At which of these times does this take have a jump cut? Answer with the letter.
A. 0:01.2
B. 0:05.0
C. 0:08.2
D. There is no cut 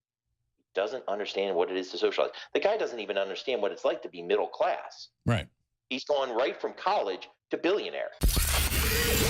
C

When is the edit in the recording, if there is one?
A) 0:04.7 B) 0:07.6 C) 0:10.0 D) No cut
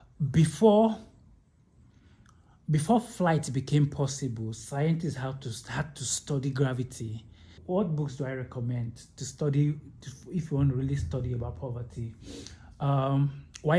B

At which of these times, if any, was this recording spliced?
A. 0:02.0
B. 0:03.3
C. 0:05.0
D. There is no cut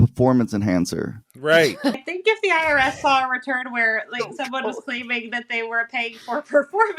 A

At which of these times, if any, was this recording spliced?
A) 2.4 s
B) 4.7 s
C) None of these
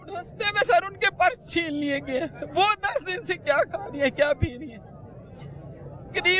C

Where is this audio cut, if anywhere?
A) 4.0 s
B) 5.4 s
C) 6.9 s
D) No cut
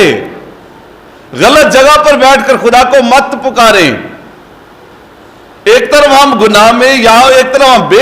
D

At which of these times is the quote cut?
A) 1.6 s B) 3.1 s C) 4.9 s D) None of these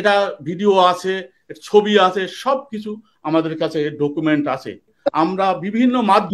C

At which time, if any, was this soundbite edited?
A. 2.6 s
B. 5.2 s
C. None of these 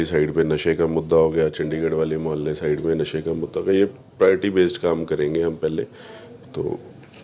C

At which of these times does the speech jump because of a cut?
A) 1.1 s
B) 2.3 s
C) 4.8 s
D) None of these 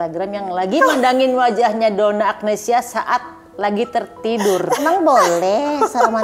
C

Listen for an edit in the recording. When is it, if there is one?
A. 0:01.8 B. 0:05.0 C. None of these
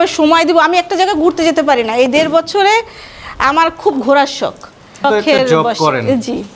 B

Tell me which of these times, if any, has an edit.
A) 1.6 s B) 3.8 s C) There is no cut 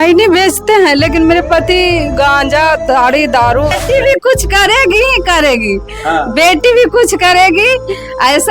B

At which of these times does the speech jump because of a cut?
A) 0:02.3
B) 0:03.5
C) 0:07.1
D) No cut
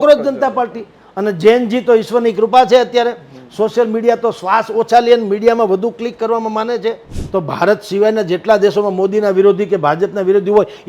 C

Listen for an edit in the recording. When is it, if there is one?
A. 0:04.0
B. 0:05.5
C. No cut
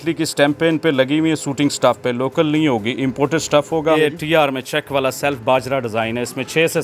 A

